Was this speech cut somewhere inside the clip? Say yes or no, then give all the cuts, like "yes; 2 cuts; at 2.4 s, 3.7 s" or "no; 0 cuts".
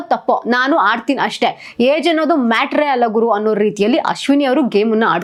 no; 0 cuts